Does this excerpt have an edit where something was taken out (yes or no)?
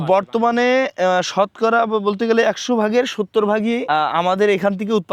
no